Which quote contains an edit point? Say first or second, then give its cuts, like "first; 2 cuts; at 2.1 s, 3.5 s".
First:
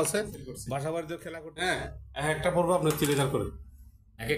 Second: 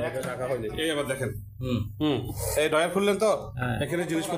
first; 1 cut; at 1.2 s